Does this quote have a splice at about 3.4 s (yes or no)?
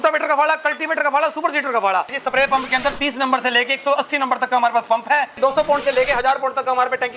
no